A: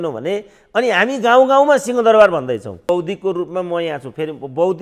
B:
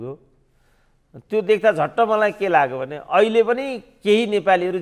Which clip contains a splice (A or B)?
A